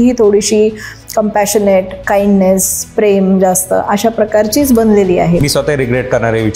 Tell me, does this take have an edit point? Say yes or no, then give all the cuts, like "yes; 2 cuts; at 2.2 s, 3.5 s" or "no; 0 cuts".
yes; 1 cut; at 5.4 s